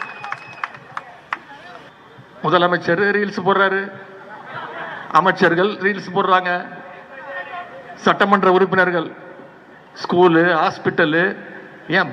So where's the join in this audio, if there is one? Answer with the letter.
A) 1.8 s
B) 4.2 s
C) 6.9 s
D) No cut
A